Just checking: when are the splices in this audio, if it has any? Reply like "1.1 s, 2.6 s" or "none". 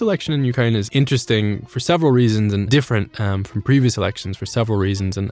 0.9 s, 2.7 s